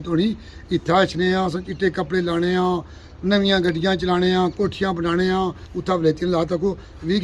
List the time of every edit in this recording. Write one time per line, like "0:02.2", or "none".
0:05.7